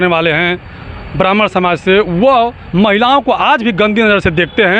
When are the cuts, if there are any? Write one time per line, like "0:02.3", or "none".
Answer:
none